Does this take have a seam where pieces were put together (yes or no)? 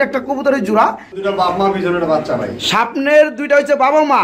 yes